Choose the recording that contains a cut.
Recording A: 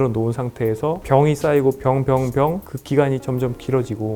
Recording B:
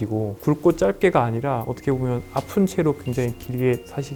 A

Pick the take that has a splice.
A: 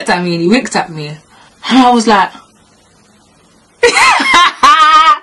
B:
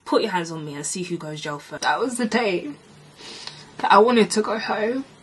B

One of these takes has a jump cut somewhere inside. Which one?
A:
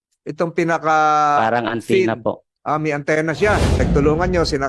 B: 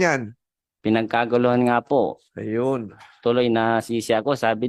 A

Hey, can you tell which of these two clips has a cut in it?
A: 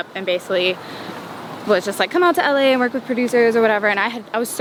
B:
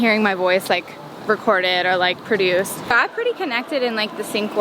B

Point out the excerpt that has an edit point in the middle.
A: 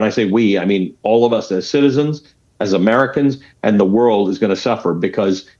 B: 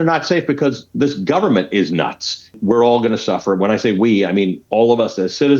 B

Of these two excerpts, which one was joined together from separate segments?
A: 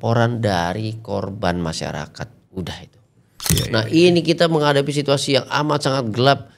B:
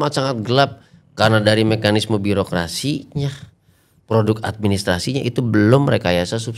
A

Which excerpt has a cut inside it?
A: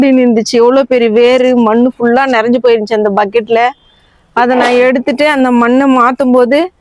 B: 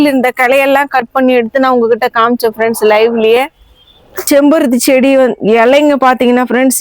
B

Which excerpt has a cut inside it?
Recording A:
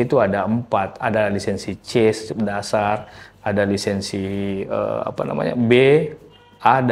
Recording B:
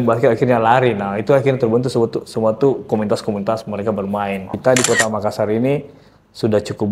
B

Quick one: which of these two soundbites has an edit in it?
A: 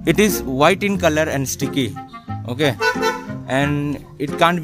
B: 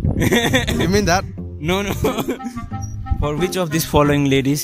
B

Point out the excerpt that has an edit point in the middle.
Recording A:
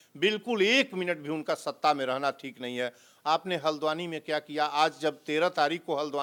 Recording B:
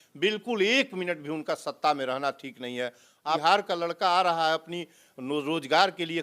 B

